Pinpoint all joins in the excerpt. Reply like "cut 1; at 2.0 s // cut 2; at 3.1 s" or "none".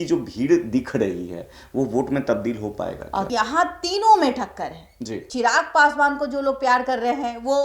cut 1; at 3.3 s // cut 2; at 5.3 s